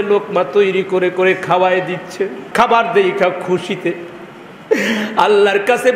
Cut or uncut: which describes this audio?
cut